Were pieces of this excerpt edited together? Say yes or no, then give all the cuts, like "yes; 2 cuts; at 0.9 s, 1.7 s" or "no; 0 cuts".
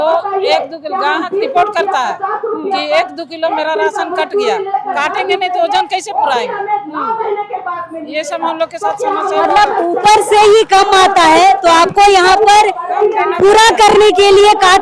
no; 0 cuts